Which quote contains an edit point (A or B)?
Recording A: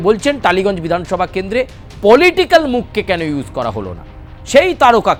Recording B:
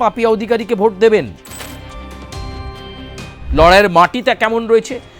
B